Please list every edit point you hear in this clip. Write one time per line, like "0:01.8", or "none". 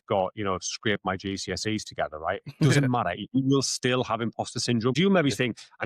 0:05.0